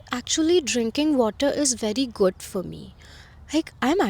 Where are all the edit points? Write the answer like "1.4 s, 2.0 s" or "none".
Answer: none